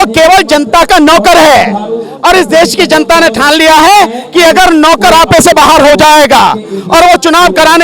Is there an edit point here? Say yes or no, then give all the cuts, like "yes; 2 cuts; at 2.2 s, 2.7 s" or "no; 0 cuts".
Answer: no; 0 cuts